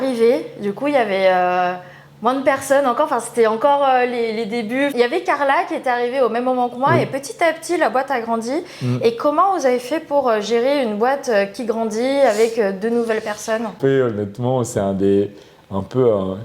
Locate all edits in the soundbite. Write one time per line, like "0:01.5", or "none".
0:04.9
0:13.8